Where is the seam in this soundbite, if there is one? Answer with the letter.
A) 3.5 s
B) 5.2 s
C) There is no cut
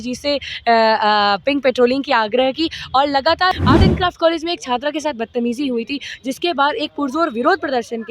A